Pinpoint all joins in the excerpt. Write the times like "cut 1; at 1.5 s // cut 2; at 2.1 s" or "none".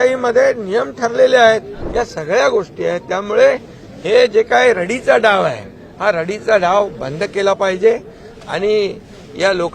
cut 1; at 1.8 s